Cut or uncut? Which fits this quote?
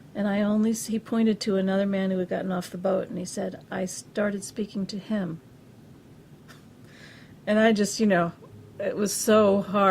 cut